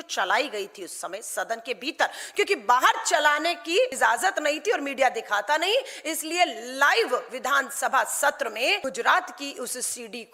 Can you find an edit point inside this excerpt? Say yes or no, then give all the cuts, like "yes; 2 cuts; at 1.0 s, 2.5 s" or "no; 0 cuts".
yes; 2 cuts; at 3.9 s, 8.8 s